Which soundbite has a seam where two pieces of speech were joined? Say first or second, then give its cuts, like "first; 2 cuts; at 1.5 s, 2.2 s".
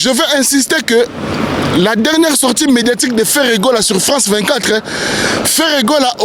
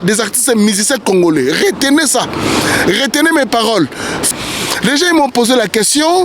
second; 1 cut; at 4.2 s